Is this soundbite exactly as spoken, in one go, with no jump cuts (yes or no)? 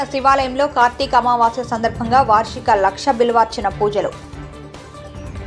yes